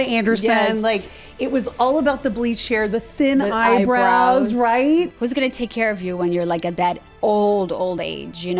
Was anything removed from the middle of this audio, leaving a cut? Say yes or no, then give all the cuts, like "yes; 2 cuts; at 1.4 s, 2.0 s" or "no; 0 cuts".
yes; 1 cut; at 5.1 s